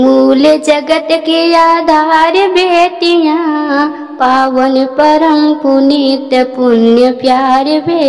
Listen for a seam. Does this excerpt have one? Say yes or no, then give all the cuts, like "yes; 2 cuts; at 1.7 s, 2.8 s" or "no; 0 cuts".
no; 0 cuts